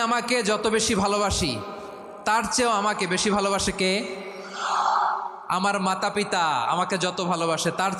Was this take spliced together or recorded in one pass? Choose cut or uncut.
uncut